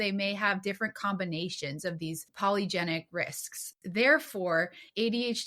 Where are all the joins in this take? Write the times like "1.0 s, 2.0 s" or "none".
2.2 s, 3.8 s